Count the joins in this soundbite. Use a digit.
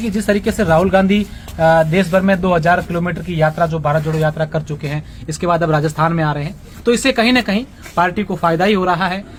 0